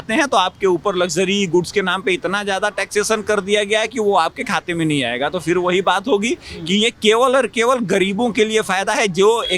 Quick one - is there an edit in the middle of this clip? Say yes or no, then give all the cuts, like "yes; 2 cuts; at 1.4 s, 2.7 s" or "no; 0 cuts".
no; 0 cuts